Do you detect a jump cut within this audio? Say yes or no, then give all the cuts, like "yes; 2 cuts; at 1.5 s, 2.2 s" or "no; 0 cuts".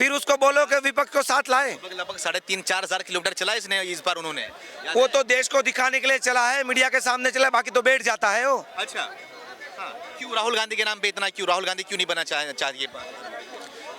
no; 0 cuts